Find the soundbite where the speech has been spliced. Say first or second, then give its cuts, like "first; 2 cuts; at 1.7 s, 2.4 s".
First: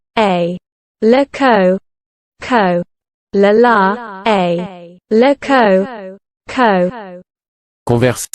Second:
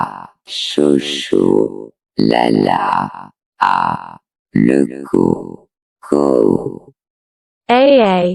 first; 1 cut; at 1.1 s